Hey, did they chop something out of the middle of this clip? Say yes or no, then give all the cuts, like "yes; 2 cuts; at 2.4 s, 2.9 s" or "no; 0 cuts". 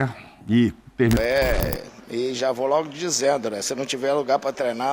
yes; 1 cut; at 1.2 s